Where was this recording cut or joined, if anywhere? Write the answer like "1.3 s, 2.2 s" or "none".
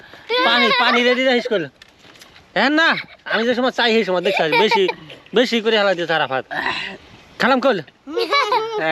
none

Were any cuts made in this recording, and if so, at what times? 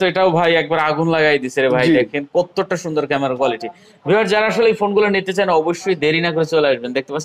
none

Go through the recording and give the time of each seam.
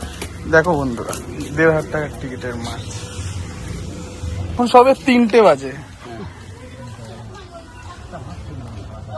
none

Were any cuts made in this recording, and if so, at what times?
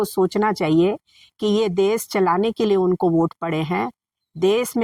none

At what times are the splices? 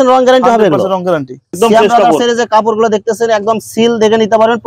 1.5 s

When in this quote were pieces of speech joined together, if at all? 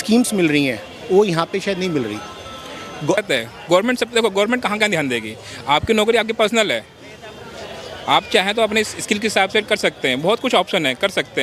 3.2 s

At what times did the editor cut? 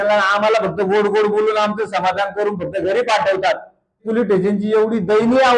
4.0 s

